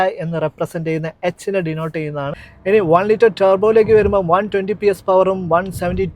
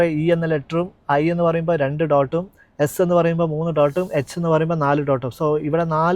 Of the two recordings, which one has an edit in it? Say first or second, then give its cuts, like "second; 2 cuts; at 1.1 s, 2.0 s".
first; 1 cut; at 2.4 s